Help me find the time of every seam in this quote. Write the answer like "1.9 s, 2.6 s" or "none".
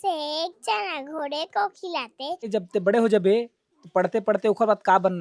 2.5 s